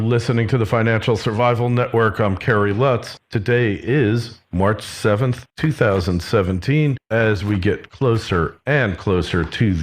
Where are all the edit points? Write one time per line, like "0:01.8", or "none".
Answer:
0:03.6